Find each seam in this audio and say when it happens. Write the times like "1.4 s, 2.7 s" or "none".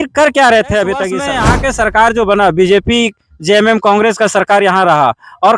1.2 s